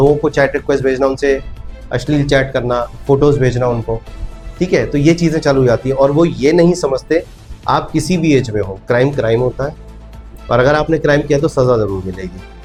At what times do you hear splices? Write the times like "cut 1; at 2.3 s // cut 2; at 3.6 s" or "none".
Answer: none